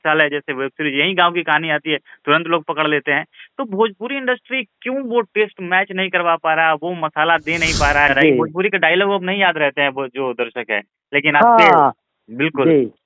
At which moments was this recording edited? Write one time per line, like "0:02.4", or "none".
0:08.1